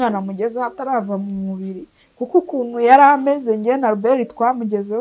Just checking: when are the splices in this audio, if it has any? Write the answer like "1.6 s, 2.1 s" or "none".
none